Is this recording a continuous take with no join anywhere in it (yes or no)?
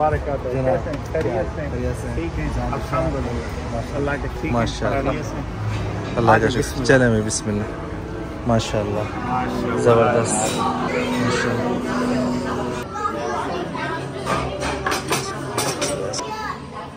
yes